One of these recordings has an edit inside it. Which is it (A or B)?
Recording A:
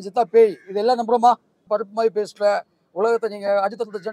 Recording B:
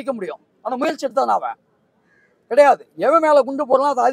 A